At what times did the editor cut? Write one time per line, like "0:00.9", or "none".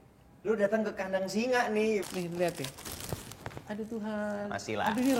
0:02.0